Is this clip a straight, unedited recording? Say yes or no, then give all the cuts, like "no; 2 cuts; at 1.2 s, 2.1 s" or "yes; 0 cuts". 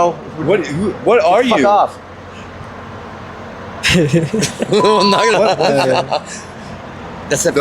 no; 1 cut; at 5.3 s